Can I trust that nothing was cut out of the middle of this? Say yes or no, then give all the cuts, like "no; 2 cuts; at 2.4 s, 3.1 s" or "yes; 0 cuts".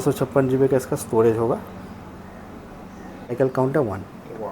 no; 1 cut; at 3.3 s